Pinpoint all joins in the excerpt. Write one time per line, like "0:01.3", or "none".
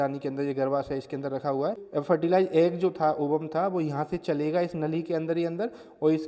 0:01.8